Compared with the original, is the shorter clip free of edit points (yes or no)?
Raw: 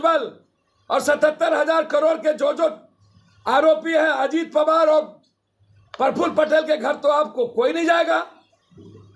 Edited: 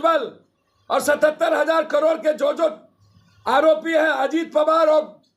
yes